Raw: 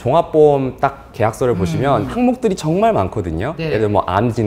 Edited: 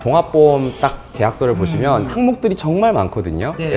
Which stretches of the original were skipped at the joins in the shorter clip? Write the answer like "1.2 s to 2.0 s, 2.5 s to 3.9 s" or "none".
none